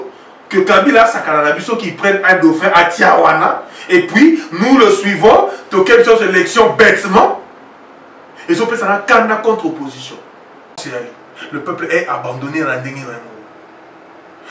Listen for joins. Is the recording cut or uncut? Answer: cut